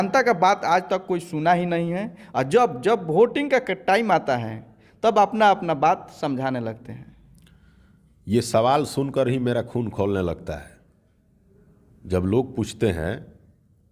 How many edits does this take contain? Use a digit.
0